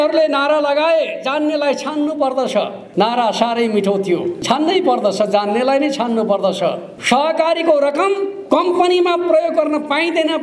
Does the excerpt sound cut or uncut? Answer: cut